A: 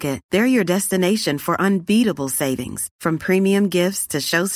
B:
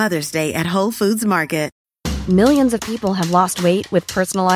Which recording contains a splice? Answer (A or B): B